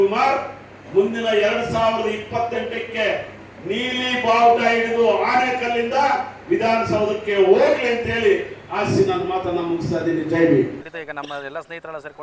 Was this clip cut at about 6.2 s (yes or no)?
no